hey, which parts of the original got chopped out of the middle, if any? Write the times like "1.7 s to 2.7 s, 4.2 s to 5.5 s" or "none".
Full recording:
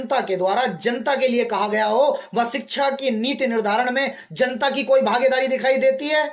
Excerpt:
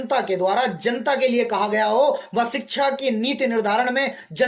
none